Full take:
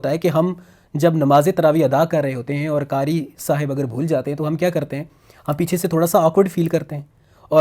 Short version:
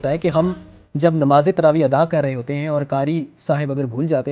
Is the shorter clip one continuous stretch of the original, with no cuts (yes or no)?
yes